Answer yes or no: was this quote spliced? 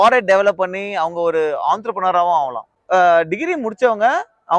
yes